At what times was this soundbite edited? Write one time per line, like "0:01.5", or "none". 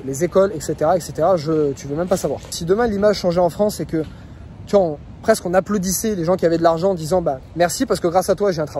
0:02.6
0:07.4